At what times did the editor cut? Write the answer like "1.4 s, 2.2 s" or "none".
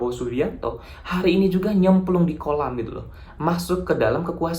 none